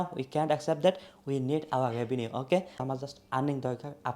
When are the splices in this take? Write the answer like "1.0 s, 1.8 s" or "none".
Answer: 2.8 s